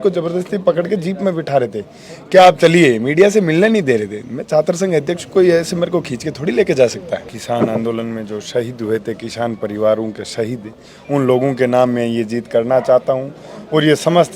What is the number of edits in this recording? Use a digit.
1